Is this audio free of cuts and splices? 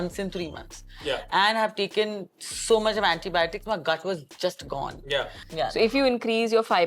no; 1 cut; at 5.4 s

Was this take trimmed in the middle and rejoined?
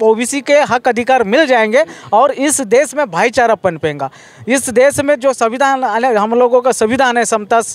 no; 0 cuts

